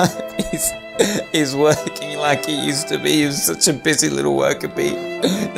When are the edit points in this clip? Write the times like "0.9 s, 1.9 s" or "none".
none